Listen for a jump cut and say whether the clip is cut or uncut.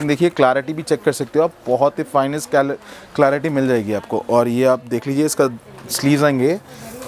uncut